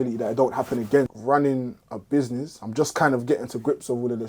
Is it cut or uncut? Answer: cut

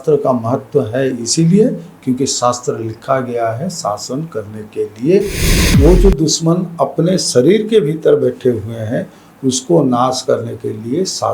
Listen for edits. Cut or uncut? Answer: cut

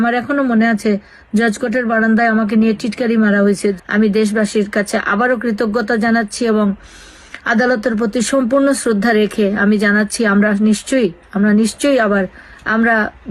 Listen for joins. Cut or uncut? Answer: cut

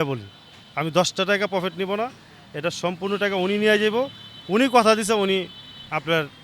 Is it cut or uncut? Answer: uncut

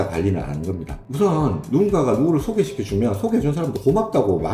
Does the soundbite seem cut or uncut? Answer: cut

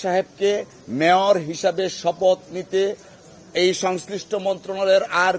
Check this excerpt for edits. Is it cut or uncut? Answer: uncut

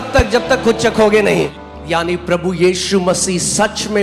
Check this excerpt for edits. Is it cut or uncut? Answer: cut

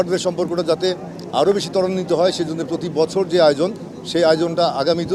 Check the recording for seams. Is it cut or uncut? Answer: uncut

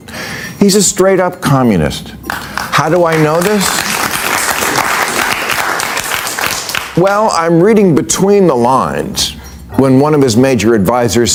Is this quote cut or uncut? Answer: uncut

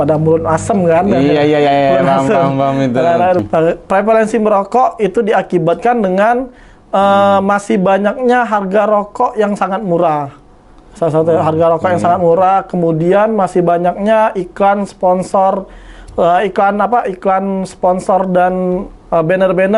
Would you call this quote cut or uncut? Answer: cut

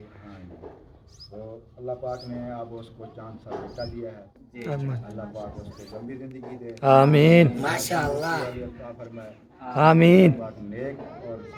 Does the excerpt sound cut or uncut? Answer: uncut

